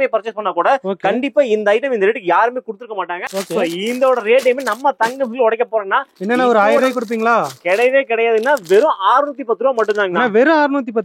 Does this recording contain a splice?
yes; 1 cut; at 3.2 s

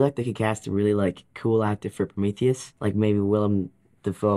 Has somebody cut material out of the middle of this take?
yes; 1 cut; at 2.7 s

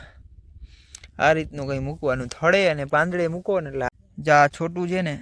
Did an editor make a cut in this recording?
yes; 1 cut; at 3.9 s

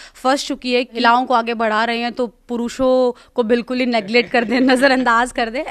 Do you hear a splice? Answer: yes; 1 cut; at 1.0 s

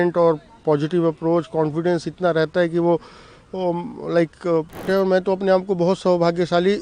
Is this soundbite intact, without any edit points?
no; 1 cut; at 4.9 s

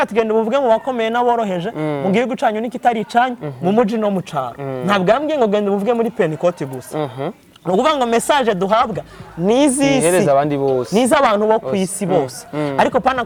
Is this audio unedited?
yes; 0 cuts

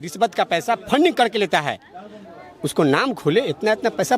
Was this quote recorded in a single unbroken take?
yes; 0 cuts

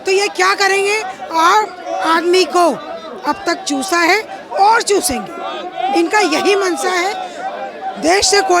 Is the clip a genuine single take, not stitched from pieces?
yes; 0 cuts

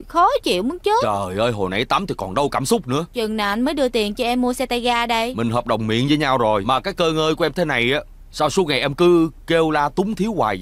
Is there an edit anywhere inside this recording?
yes; 3 cuts; at 3.1 s, 5.3 s, 6.6 s

